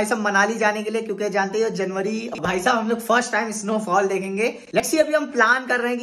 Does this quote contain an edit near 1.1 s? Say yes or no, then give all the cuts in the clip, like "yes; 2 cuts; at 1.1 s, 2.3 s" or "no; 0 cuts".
no; 2 cuts; at 2.4 s, 4.8 s